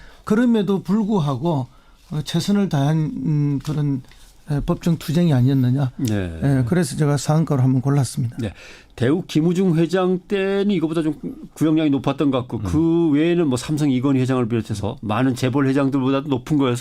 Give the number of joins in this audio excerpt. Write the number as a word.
one